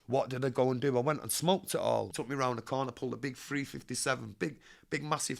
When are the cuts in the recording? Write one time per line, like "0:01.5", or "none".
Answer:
0:02.1